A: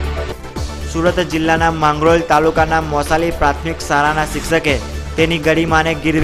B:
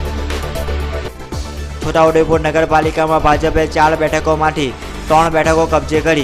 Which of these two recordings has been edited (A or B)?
B